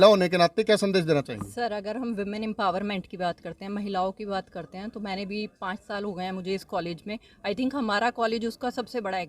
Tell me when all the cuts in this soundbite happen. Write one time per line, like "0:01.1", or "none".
none